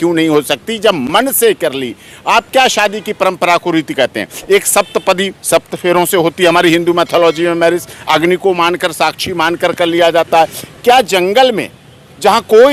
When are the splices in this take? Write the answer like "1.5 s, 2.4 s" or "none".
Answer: none